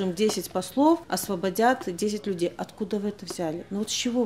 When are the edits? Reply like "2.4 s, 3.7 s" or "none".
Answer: 1.1 s